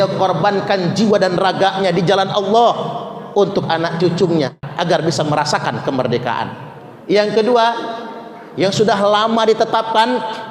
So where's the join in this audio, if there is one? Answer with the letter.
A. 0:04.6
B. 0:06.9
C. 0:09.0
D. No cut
A